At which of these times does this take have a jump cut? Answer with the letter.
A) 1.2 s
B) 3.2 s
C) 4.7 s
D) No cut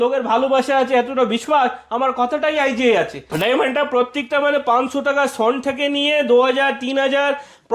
B